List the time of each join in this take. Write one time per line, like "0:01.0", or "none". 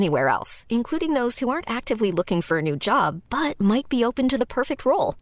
none